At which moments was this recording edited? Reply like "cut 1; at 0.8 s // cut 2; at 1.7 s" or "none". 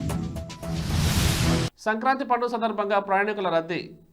cut 1; at 1.1 s